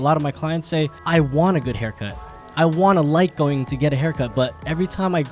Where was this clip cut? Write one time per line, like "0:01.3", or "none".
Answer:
0:01.0